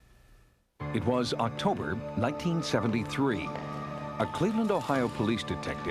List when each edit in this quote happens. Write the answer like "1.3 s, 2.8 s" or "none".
1.0 s